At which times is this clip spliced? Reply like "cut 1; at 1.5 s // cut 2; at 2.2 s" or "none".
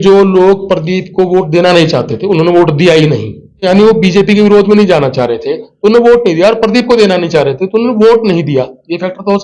cut 1; at 3.7 s